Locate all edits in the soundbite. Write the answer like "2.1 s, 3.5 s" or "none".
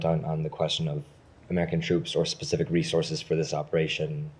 none